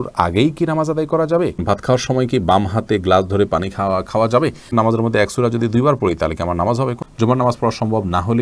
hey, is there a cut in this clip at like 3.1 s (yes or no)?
no